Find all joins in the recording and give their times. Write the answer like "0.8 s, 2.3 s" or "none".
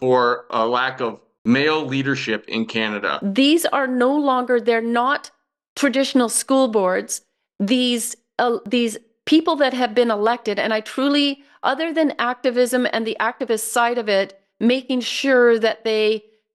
1.3 s, 3.2 s